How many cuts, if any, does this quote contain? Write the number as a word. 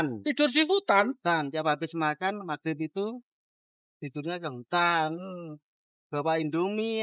zero